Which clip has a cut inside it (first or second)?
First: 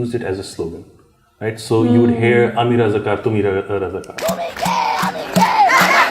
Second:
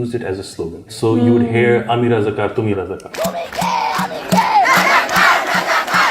second